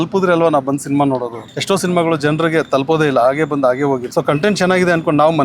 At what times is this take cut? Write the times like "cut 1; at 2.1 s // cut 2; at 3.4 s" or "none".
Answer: cut 1; at 1.5 s // cut 2; at 4.1 s